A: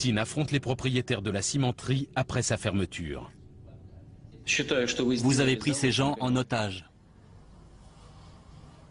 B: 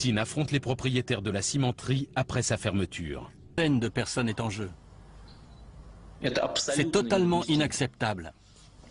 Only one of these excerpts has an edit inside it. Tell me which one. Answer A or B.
A